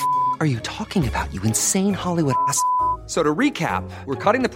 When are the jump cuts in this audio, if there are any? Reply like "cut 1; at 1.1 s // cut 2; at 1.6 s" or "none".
none